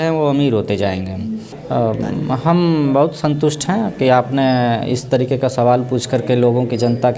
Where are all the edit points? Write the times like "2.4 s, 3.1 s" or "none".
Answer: 1.5 s